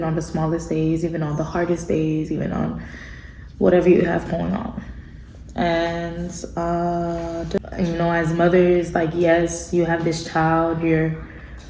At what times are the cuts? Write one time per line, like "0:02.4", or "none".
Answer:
0:07.7